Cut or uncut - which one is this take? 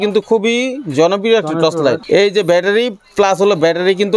cut